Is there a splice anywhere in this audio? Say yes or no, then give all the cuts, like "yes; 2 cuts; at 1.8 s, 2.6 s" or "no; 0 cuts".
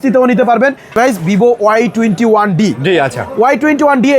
yes; 1 cut; at 0.9 s